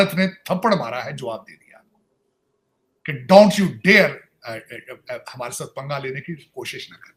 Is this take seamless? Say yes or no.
yes